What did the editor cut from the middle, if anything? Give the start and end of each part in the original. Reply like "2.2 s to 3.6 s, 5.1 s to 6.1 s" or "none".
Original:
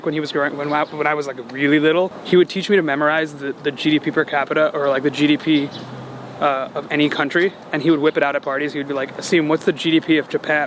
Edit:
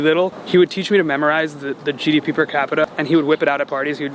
4.6 s to 7.6 s